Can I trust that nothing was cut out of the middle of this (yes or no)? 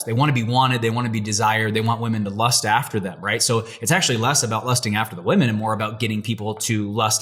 yes